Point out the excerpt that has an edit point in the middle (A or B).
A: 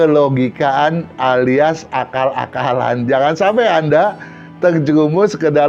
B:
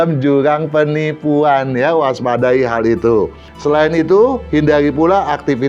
B